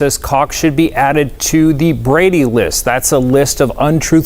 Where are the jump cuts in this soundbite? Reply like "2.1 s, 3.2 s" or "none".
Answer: none

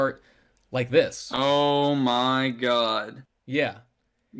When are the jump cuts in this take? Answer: none

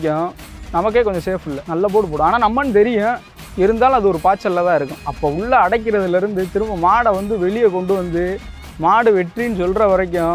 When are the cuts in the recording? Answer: 5.1 s

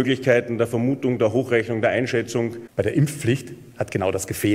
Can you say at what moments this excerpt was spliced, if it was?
2.6 s

